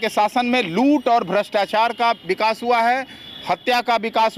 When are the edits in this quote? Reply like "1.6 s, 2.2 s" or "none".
none